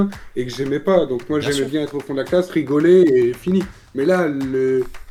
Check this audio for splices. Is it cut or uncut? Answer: uncut